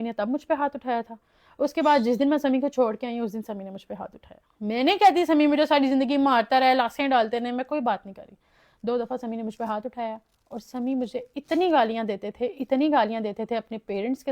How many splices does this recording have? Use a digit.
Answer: 0